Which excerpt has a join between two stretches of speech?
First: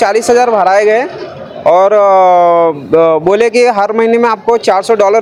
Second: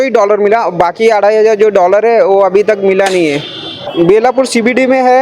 second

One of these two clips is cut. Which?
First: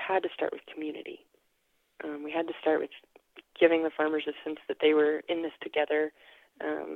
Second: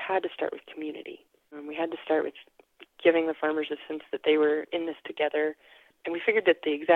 second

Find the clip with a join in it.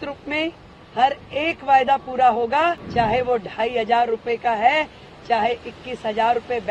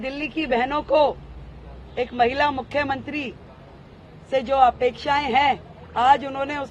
first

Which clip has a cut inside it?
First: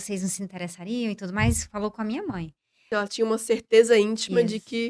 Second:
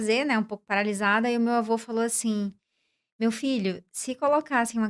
first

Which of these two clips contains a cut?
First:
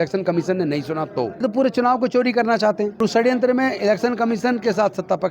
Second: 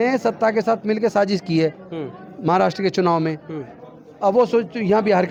first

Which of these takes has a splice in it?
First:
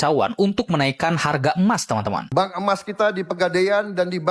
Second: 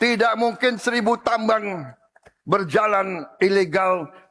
first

